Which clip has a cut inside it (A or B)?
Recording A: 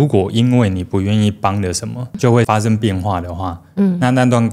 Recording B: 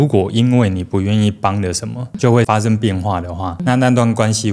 B